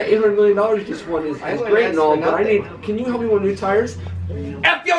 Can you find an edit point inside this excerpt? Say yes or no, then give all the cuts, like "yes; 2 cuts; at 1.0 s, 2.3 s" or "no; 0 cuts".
no; 0 cuts